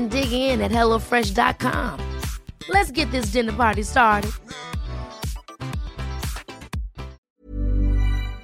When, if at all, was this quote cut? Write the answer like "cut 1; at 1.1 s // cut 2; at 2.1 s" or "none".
cut 1; at 7.2 s